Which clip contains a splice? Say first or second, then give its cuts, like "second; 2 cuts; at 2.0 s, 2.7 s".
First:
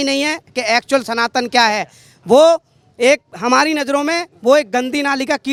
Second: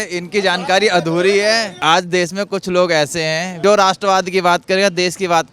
second; 2 cuts; at 1.7 s, 3.6 s